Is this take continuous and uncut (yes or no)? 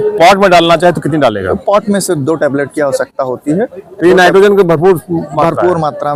yes